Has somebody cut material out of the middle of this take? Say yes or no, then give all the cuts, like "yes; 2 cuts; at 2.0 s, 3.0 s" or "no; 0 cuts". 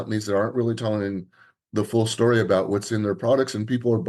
no; 0 cuts